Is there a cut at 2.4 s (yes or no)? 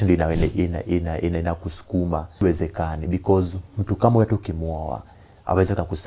yes